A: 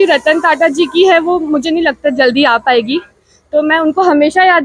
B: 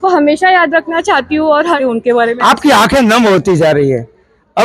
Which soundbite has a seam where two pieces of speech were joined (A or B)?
B